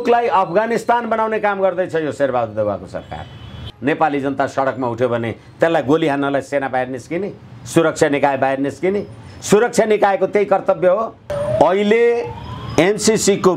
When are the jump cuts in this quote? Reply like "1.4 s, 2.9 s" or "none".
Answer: 3.7 s, 11.3 s